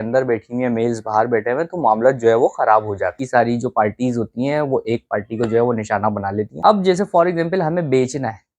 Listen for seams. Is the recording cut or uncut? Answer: cut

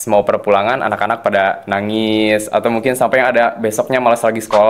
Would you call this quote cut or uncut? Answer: uncut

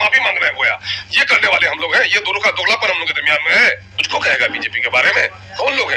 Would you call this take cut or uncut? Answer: cut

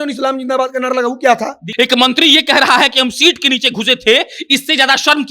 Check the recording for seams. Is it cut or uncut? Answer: cut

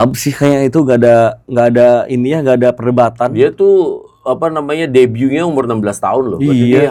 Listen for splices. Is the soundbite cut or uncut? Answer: uncut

